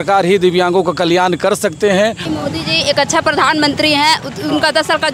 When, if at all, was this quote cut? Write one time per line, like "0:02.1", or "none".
0:02.4